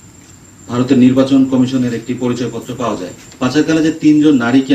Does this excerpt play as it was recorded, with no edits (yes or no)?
yes